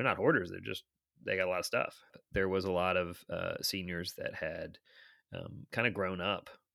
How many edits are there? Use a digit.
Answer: 1